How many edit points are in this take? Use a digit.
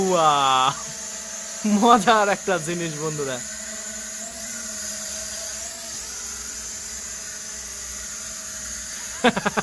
0